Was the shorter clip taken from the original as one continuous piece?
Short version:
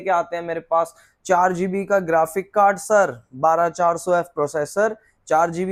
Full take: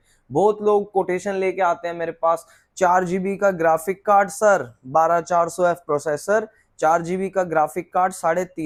yes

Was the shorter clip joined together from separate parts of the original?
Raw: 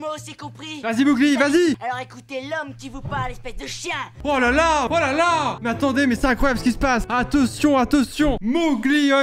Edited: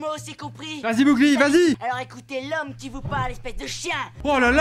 no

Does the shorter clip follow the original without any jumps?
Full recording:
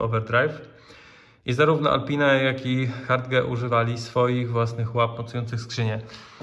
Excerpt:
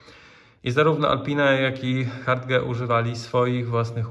yes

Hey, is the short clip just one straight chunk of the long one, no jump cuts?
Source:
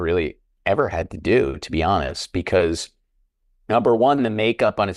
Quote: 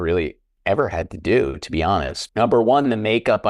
no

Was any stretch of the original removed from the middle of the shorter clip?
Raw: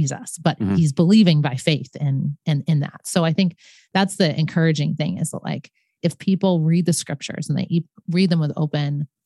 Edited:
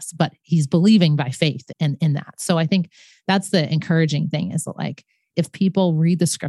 yes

